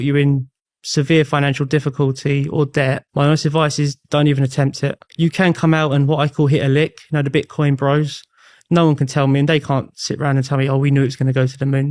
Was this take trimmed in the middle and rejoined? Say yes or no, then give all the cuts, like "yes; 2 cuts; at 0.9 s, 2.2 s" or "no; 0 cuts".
yes; 3 cuts; at 3.0 s, 4.0 s, 5.0 s